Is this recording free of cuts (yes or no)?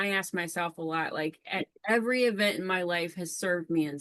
yes